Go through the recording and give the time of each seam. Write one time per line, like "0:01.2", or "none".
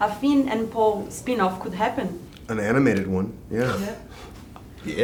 none